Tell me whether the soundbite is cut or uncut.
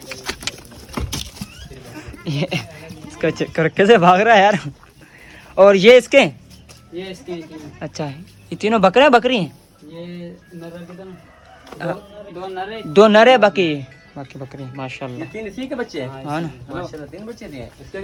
uncut